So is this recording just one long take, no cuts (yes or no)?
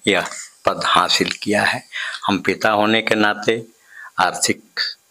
yes